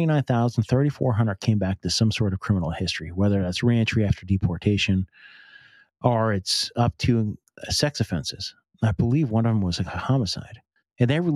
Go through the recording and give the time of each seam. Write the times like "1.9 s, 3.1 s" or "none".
none